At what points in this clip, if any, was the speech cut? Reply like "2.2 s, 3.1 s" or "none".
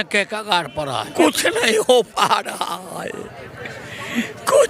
1.0 s